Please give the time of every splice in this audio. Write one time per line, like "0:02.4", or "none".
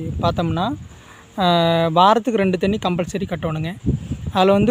none